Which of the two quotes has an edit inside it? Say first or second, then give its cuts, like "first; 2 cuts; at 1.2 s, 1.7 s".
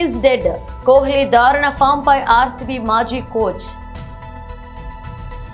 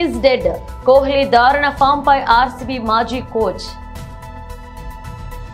first; 1 cut; at 3.6 s